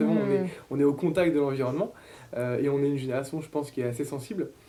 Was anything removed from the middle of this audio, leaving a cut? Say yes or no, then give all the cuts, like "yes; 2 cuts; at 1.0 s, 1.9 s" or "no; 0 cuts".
no; 0 cuts